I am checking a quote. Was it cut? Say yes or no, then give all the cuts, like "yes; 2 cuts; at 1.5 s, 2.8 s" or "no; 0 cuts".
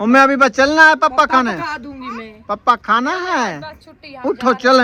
no; 0 cuts